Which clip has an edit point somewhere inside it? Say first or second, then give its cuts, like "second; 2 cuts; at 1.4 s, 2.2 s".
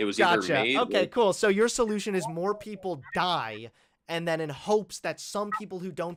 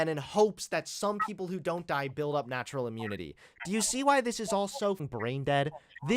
second; 1 cut; at 5.0 s